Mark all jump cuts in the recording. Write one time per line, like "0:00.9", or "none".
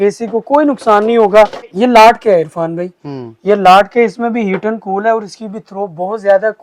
0:01.7